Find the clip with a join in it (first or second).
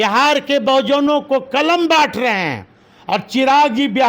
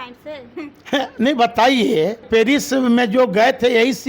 second